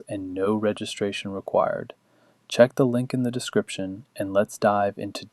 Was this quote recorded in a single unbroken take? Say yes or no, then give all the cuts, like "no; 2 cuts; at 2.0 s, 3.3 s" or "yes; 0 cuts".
no; 1 cut; at 2.7 s